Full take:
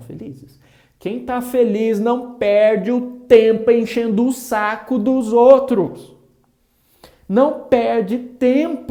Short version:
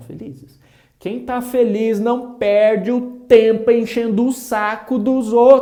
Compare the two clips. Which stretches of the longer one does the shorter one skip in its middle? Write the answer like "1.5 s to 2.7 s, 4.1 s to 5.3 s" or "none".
none

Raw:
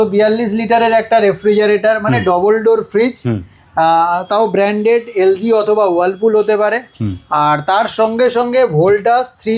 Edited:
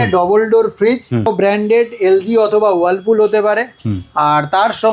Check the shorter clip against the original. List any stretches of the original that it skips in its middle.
3.4 s to 4.4 s

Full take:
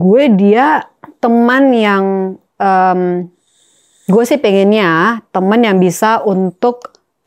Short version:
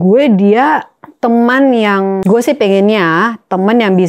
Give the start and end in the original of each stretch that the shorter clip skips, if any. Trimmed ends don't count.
2.2 s to 4.0 s

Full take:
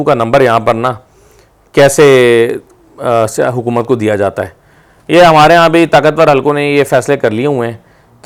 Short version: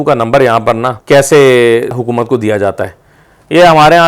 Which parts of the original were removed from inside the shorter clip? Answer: 0.9 s to 1.6 s, 2.6 s to 3.6 s

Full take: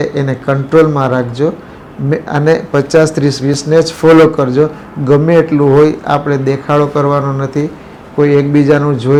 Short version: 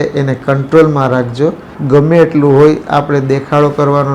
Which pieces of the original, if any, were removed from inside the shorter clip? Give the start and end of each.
1.7 s to 4.9 s

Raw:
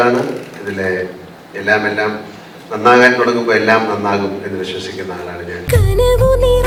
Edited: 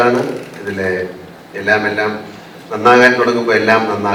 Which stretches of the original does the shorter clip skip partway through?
none

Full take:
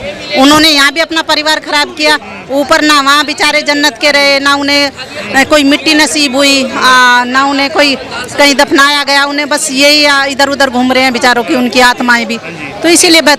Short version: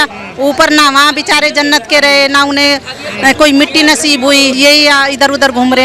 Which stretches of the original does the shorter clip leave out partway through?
6.7 s to 9.7 s

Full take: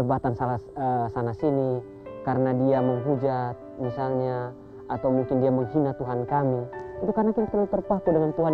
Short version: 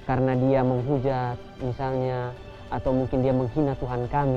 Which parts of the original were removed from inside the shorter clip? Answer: none

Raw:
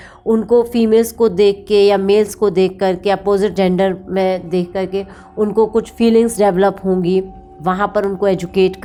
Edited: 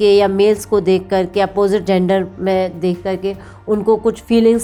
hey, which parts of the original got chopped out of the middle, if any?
none

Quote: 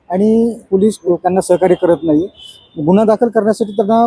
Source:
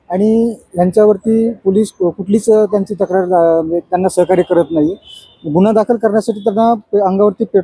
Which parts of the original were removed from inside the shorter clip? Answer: 0.9 s to 3.6 s

